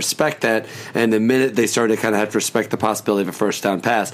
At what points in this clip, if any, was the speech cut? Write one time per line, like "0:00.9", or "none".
none